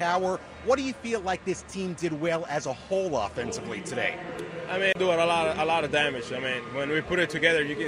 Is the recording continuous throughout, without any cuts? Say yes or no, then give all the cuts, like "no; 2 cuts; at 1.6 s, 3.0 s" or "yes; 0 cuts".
no; 1 cut; at 4.9 s